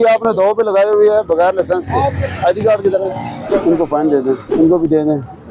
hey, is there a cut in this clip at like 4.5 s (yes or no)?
yes